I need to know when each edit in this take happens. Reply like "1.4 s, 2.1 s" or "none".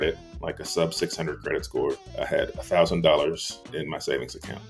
2.1 s, 3.7 s